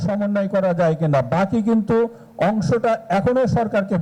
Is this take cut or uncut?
uncut